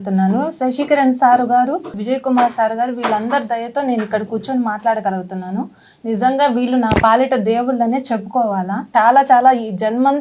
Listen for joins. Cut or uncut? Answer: cut